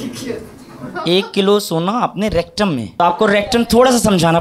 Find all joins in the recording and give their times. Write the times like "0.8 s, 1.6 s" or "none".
2.9 s